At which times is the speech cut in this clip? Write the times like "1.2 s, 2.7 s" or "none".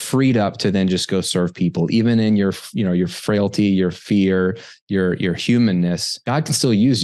6.1 s